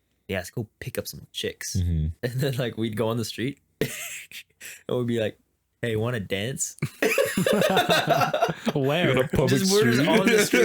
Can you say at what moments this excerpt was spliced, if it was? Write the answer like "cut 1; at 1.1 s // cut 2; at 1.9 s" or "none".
cut 1; at 2.1 s